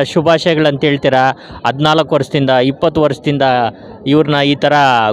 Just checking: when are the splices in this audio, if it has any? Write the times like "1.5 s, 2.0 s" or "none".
none